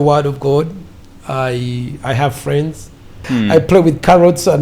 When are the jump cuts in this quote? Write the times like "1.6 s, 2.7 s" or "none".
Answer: 3.2 s